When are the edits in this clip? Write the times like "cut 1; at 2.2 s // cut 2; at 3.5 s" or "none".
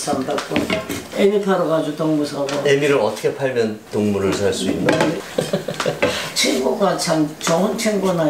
cut 1; at 1.0 s